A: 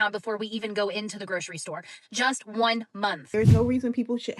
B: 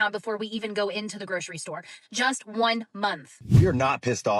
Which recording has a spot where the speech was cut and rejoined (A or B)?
A